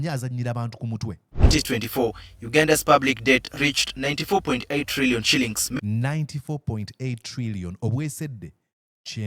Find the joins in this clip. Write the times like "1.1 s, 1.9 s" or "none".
1.5 s, 5.6 s

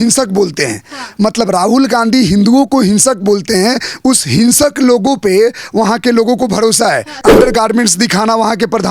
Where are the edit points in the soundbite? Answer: 7.2 s

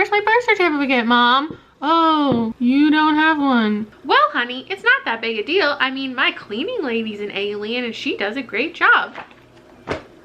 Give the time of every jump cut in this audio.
2.5 s, 3.9 s

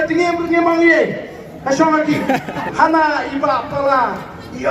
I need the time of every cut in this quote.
2.7 s

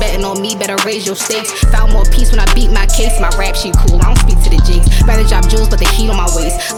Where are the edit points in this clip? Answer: none

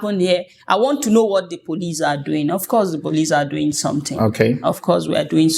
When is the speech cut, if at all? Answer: none

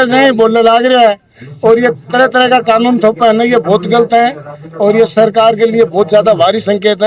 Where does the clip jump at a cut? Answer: none

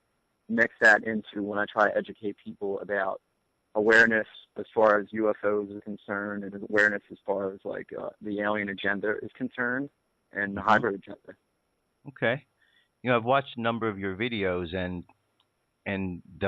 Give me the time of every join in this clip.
8.5 s

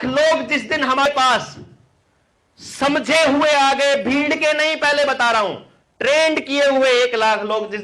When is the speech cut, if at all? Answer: 1.1 s

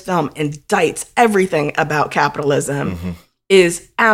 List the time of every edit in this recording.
none

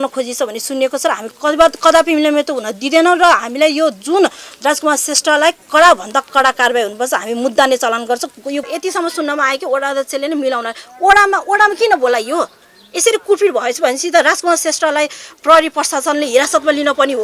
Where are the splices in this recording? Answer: 8.6 s

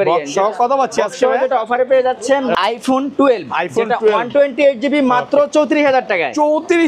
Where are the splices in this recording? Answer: 2.6 s

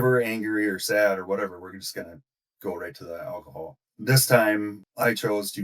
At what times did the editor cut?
3.9 s

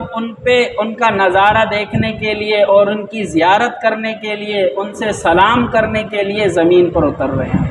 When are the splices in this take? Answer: none

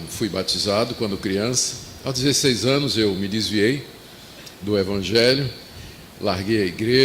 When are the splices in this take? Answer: 2.0 s

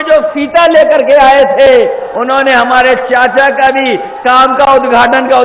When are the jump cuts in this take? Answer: none

